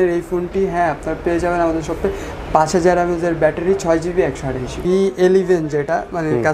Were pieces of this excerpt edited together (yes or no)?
yes